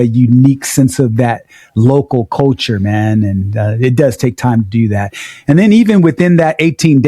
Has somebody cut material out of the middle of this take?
no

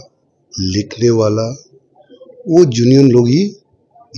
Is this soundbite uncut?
yes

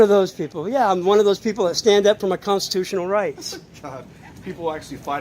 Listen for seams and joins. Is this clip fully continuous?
yes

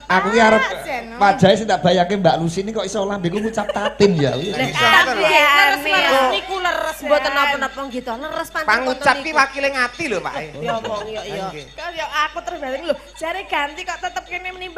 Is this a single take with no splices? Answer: yes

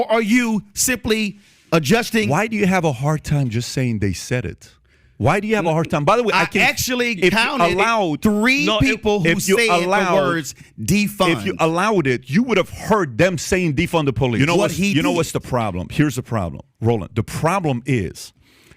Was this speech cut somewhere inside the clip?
yes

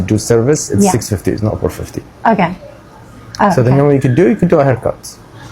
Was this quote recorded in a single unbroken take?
yes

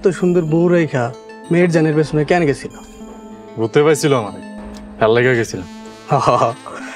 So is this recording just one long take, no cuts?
yes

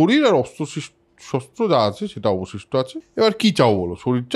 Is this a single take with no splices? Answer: no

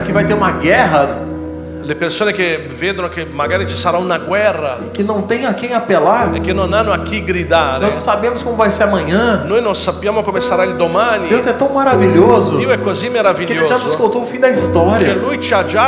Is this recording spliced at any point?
no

